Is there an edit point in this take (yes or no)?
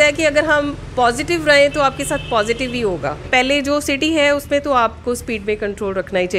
yes